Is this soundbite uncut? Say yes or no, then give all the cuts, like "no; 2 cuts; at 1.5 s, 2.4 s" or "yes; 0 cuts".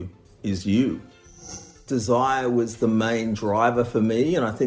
no; 1 cut; at 1.5 s